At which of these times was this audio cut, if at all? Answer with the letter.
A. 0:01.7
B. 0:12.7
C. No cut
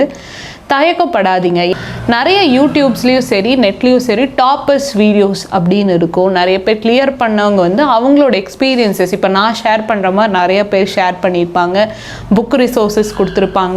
A